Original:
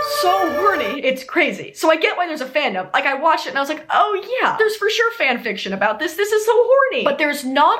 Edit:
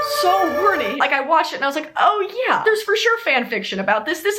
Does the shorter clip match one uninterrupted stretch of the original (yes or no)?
no